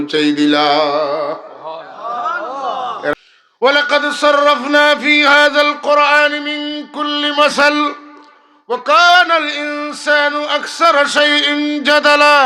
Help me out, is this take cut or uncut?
cut